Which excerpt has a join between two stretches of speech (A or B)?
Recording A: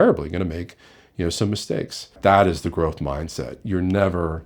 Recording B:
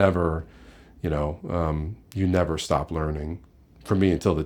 A